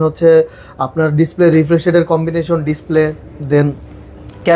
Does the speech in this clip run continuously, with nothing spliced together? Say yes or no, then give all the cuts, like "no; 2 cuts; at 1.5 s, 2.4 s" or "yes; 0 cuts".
yes; 0 cuts